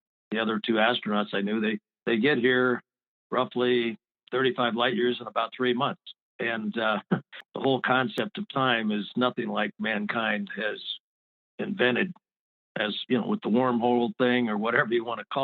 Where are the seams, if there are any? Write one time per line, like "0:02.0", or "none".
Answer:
0:07.4